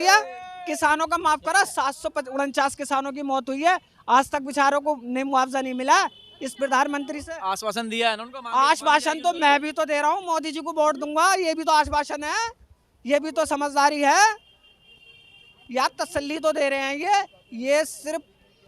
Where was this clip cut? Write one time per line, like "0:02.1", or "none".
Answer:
none

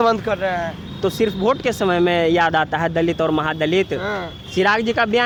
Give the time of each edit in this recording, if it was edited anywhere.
none

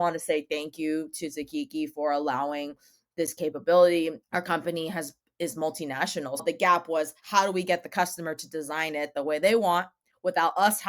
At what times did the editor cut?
0:06.4

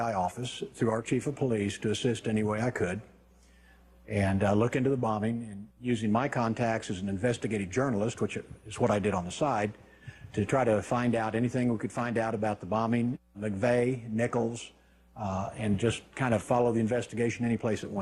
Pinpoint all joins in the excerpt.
0:05.0

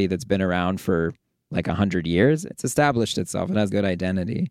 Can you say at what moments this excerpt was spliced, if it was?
0:02.4
0:03.7

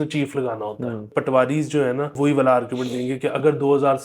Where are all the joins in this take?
0:01.1
0:02.1

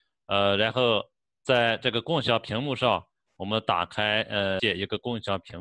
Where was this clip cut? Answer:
0:04.6

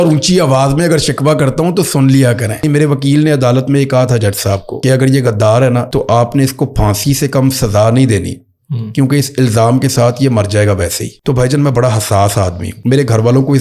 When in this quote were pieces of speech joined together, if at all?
0:02.6
0:04.7
0:05.9
0:11.1
0:12.7

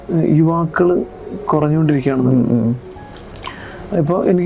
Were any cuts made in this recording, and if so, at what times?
none

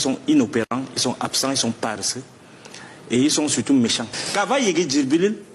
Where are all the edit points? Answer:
0:04.0

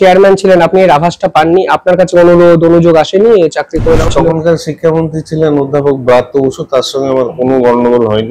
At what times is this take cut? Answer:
0:04.1

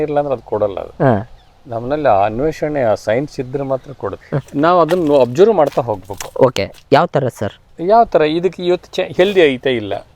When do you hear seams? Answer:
none

